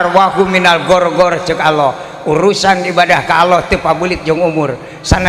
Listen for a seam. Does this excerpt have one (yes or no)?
no